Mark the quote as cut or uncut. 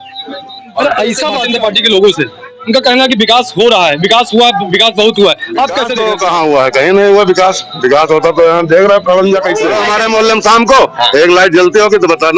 cut